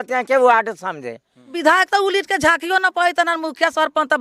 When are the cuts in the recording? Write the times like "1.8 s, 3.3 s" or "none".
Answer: 1.5 s